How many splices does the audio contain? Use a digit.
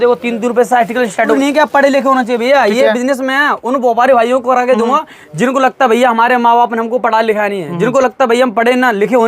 1